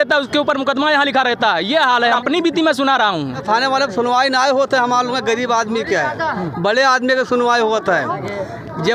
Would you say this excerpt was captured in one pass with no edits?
no; 2 cuts; at 2.2 s, 3.4 s

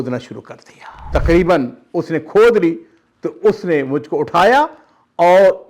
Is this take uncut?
no; 1 cut; at 1.0 s

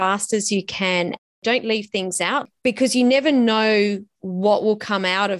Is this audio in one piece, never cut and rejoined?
no; 2 cuts; at 1.3 s, 2.4 s

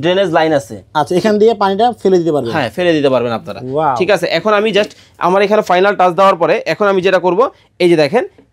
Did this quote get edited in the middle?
no; 0 cuts

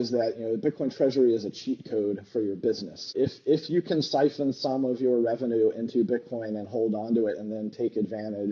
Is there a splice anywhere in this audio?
no; 0 cuts

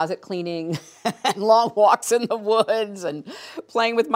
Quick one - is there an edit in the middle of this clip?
no; 0 cuts

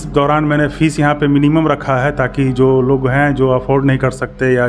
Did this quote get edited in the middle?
no; 0 cuts

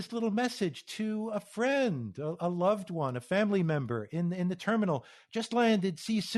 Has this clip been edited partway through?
no; 0 cuts

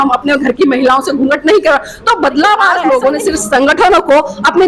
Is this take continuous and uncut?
no; 1 cut; at 2.8 s

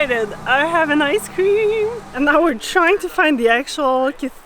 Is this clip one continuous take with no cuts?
no; 1 cut; at 2.0 s

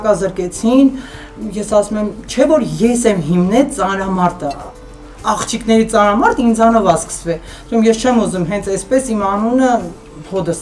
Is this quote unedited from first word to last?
yes; 0 cuts

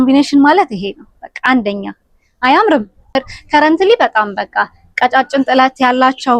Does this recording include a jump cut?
yes; 1 cut; at 3.3 s

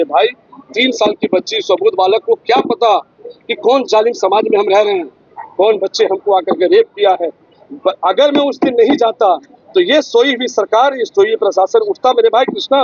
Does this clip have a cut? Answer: no; 0 cuts

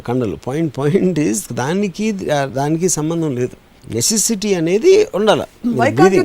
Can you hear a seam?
no; 0 cuts

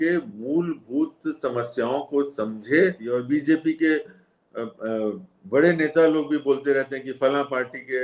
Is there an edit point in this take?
yes; 1 cut; at 3.1 s

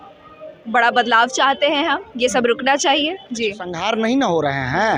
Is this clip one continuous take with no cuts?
no; 1 cut; at 3.7 s

